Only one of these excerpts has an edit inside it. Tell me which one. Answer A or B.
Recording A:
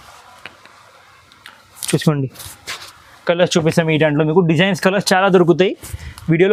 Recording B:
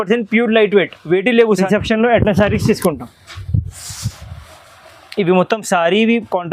B